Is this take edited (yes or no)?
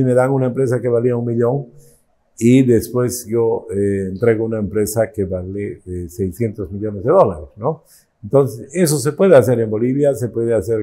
no